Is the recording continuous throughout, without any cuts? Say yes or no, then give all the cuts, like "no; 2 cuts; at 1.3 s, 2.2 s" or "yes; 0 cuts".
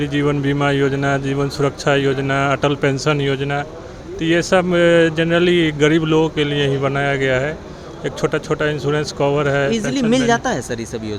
yes; 0 cuts